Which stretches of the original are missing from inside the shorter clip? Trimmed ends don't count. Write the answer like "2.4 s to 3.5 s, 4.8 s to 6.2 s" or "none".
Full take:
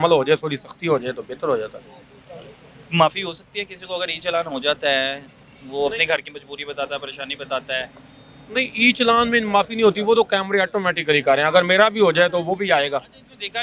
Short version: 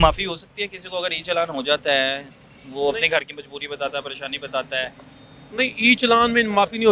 none

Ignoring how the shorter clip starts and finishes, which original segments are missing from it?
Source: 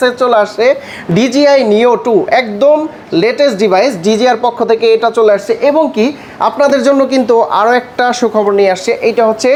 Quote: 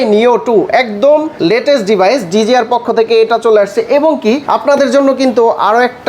2.9 s to 3.0 s, 6.2 s to 6.4 s

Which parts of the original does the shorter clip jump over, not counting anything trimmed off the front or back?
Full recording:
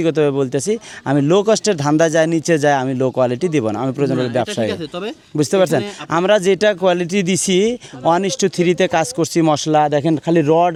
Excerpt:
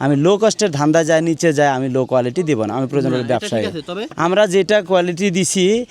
5.1 s to 6.0 s

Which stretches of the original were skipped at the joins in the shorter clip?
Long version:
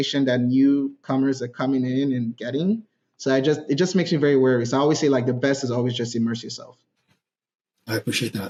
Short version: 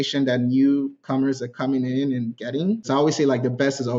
2.8 s to 4.7 s

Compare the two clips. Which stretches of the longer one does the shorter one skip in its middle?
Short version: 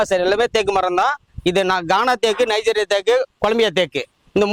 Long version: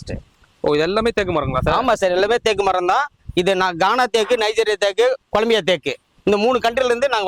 none

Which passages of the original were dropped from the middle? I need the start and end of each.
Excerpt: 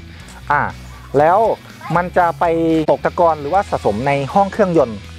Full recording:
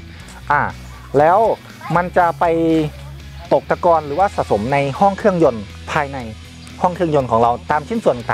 3.0 s to 3.7 s

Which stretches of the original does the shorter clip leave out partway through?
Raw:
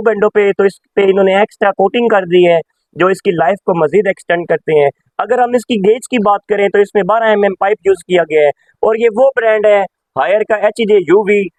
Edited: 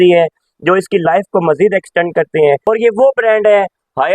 5.0 s to 8.8 s

